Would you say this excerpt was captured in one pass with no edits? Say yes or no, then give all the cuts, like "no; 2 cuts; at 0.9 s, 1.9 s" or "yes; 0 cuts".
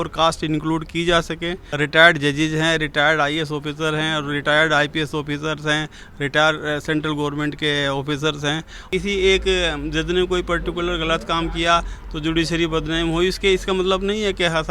no; 2 cuts; at 1.6 s, 8.8 s